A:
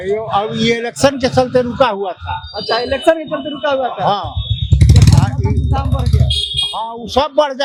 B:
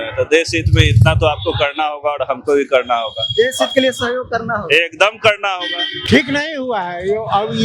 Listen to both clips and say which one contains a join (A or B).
B